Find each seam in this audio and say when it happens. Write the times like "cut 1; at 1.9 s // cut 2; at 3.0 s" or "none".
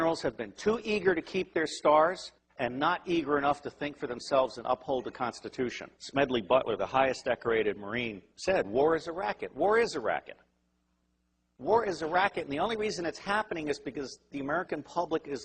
none